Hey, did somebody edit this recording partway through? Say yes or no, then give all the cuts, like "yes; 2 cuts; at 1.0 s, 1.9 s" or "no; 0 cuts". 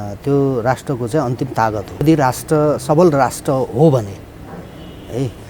no; 0 cuts